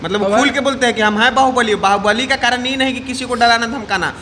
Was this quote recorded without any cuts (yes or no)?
yes